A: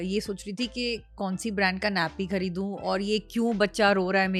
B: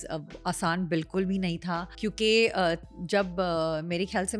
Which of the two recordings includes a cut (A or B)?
B